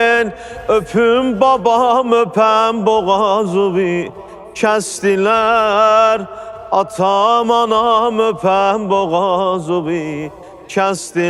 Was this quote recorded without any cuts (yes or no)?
yes